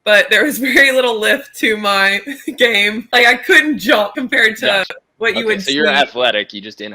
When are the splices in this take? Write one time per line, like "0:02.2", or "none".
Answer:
0:03.1
0:04.1